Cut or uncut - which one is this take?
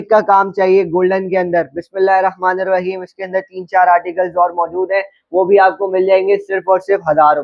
uncut